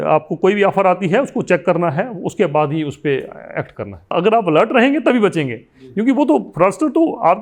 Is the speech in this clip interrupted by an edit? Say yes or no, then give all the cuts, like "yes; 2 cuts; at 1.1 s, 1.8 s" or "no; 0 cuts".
yes; 1 cut; at 4.1 s